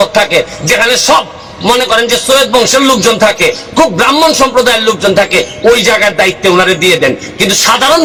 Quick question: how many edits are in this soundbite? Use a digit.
0